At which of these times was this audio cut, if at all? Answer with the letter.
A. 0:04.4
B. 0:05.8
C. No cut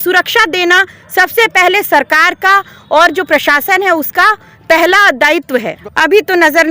B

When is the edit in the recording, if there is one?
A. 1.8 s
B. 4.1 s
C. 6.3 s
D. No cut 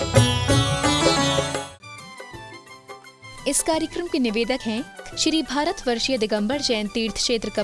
A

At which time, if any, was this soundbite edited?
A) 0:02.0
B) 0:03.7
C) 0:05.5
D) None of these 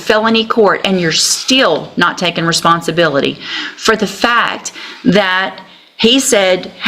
D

